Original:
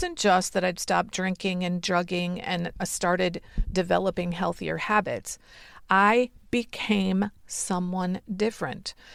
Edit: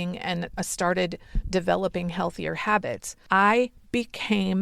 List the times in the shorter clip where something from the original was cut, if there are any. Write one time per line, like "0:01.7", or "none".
0:03.1

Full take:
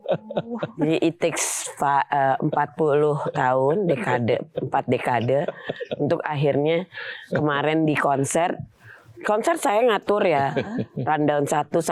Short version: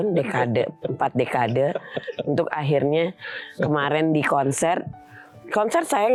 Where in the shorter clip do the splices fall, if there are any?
none

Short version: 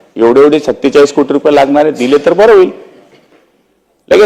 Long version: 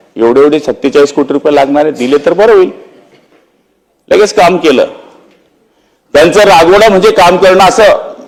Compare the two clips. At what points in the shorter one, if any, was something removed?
none

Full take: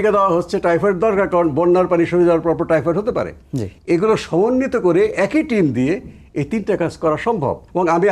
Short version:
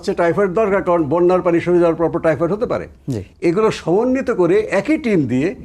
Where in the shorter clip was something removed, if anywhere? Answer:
none

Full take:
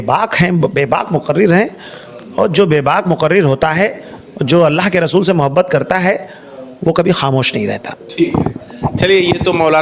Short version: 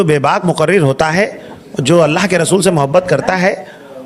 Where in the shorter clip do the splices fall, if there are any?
none

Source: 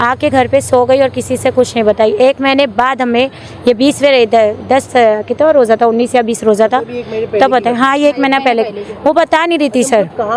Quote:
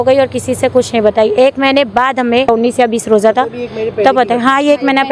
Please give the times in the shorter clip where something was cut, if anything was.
0:02.5

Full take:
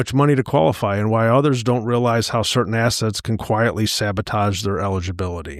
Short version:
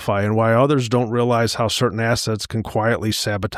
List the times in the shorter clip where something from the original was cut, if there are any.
none

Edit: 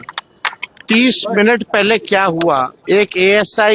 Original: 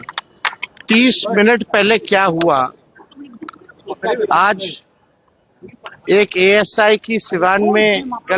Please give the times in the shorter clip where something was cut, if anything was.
0:02.8

